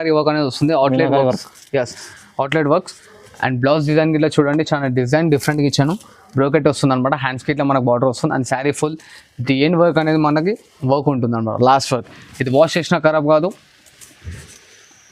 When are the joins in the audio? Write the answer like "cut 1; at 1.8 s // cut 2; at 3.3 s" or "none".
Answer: none